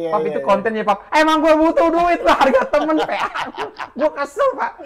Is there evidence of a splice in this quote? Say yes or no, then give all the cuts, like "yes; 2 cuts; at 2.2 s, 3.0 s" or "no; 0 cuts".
no; 0 cuts